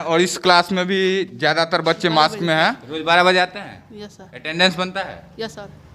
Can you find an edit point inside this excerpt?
yes; 1 cut; at 2.9 s

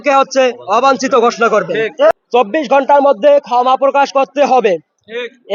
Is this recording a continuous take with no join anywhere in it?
no; 1 cut; at 2.1 s

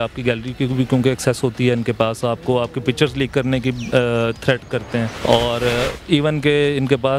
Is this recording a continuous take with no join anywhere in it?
no; 1 cut; at 5.1 s

